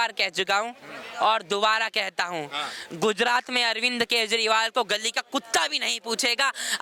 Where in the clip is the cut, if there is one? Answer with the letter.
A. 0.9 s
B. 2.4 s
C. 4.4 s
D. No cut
D